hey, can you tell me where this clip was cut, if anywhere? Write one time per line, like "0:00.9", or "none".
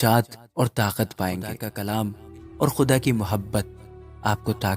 0:01.7